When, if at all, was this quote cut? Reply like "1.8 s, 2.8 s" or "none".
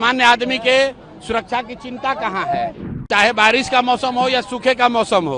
2.9 s